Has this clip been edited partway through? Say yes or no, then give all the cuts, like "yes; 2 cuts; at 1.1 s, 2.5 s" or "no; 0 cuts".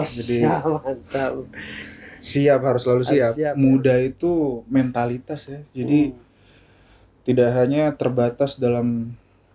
yes; 1 cut; at 3.5 s